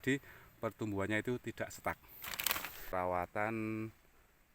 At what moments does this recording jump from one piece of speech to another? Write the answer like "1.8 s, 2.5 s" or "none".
2.9 s